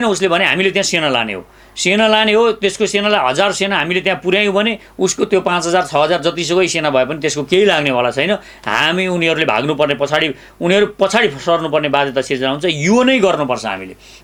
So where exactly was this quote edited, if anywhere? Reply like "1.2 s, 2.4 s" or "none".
none